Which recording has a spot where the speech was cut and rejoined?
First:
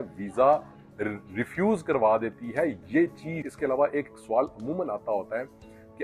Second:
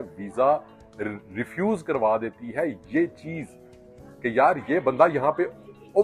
first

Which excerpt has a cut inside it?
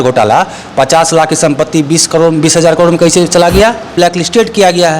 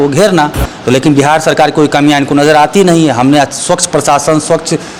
first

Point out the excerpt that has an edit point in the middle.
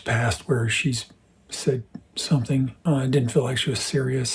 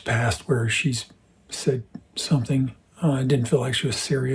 first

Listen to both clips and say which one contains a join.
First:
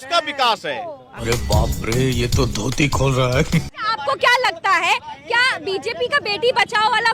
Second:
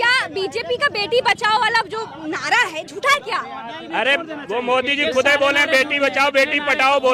first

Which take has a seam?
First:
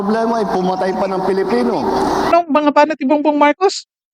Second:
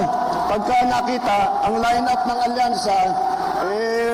first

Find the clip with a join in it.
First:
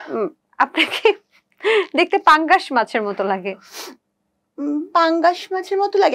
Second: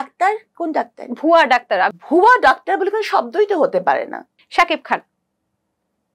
second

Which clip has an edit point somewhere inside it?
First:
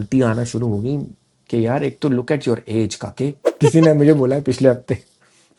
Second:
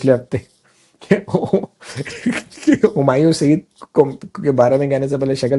first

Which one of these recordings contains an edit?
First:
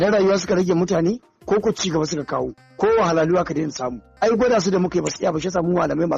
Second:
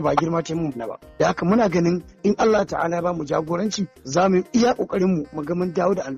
second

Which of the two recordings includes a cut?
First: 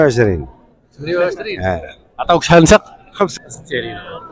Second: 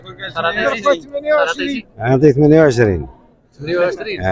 first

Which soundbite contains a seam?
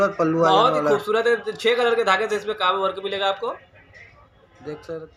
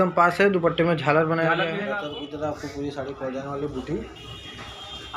second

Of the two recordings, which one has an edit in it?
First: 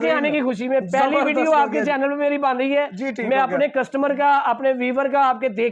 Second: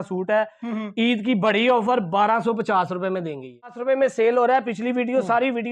second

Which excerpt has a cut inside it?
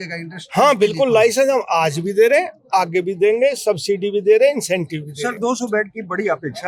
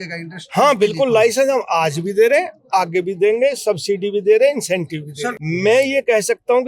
second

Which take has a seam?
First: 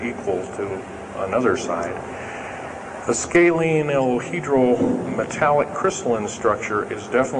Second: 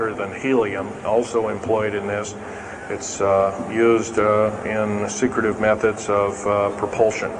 first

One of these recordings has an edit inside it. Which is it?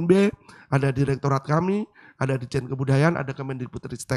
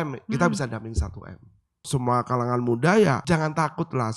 second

